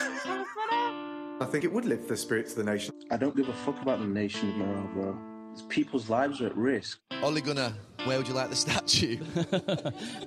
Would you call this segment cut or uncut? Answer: cut